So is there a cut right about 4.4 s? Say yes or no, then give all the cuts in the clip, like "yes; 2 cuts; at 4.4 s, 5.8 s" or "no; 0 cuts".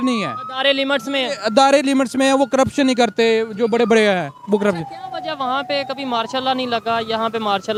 no; 0 cuts